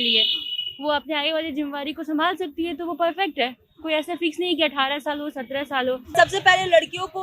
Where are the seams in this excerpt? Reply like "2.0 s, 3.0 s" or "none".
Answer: 6.1 s